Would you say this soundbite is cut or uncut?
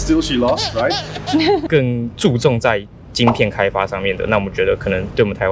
cut